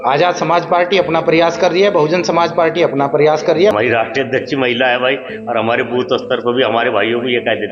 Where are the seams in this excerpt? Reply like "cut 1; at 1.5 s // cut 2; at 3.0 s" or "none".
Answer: cut 1; at 3.7 s